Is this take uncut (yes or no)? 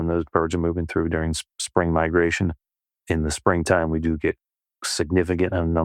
yes